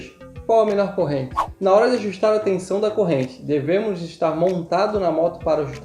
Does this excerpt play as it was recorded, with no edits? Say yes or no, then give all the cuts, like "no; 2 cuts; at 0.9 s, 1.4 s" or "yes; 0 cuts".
no; 1 cut; at 1.4 s